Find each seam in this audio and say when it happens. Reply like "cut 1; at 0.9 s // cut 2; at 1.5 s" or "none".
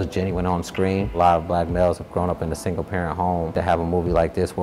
cut 1; at 1.1 s // cut 2; at 3.5 s